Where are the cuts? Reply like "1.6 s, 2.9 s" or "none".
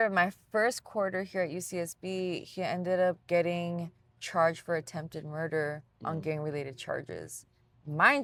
none